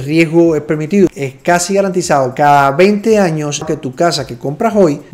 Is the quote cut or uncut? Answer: cut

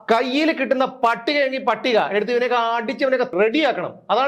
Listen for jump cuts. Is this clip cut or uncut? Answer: cut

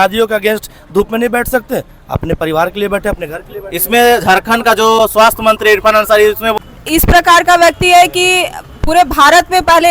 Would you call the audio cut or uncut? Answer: cut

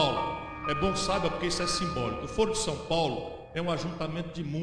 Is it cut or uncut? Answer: cut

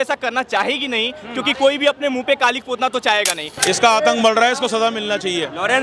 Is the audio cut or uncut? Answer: cut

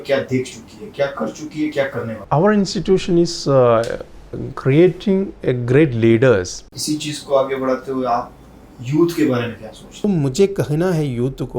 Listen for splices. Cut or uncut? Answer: cut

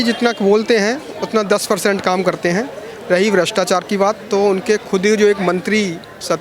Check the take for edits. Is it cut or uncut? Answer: uncut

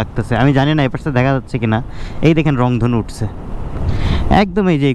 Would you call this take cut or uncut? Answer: uncut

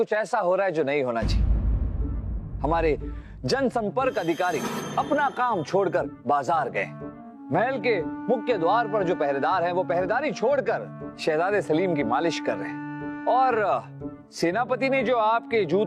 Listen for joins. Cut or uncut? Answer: uncut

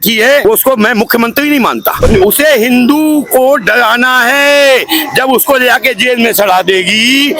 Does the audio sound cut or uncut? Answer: cut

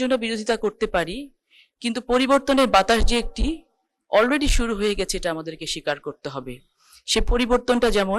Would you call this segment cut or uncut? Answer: uncut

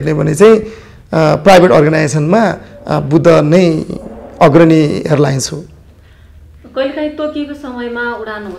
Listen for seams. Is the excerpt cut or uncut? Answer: uncut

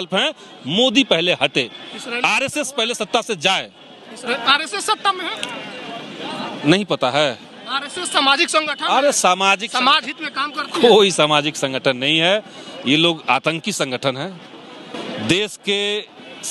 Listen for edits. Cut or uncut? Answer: uncut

